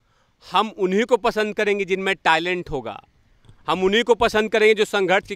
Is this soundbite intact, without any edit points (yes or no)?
yes